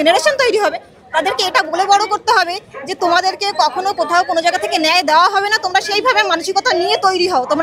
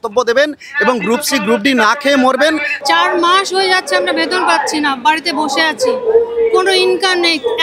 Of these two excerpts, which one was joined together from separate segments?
second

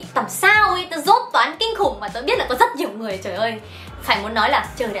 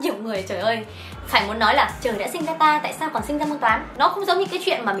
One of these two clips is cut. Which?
second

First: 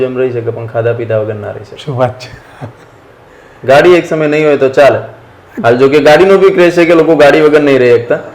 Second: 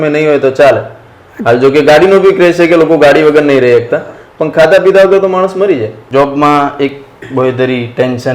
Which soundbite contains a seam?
second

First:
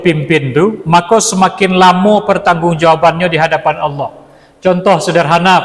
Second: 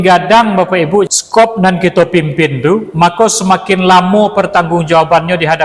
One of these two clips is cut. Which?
second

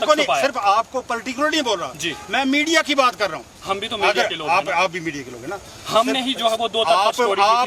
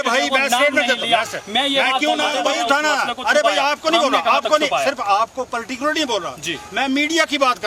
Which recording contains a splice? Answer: second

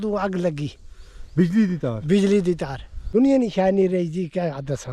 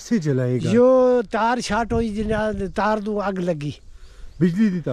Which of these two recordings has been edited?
first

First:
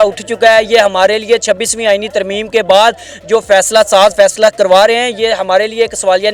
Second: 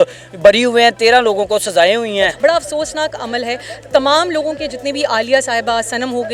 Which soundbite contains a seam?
second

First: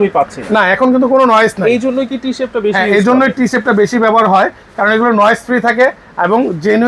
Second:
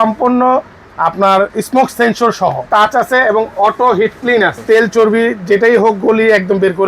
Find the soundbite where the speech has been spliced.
second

